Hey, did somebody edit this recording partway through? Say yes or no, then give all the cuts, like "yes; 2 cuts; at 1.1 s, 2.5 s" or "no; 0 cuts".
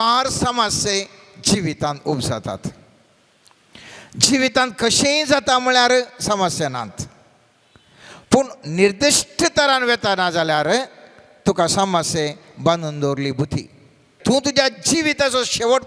yes; 1 cut; at 14.1 s